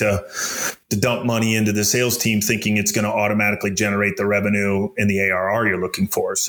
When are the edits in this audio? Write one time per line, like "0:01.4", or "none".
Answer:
none